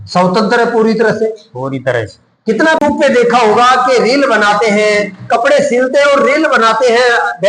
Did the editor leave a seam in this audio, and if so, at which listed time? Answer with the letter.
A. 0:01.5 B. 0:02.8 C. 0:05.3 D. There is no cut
B